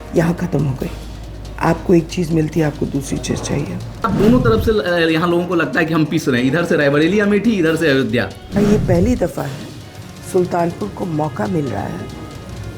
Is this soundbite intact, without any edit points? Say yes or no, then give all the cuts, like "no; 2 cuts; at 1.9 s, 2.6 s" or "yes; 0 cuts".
no; 2 cuts; at 4.1 s, 8.4 s